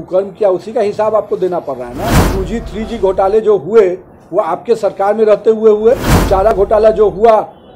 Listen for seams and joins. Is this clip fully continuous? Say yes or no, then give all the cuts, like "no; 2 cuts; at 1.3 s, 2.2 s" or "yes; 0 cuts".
no; 2 cuts; at 2.2 s, 6.5 s